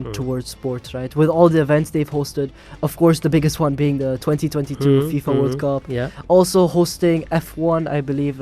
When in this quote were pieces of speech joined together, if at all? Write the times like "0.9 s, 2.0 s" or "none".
none